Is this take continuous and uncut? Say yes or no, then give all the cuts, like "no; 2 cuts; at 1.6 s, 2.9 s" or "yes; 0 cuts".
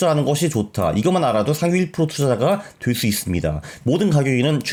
yes; 0 cuts